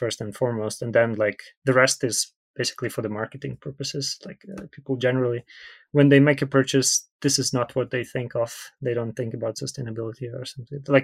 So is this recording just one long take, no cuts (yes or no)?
yes